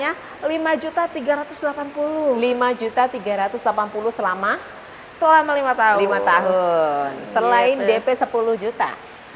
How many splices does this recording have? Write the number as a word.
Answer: zero